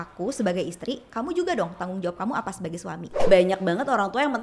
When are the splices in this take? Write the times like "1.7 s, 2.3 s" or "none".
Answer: 3.2 s